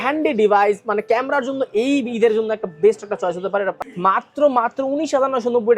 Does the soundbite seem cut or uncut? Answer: cut